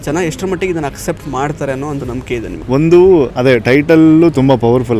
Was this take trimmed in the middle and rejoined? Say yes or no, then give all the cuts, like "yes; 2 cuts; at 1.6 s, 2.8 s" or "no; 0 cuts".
yes; 2 cuts; at 2.6 s, 3.3 s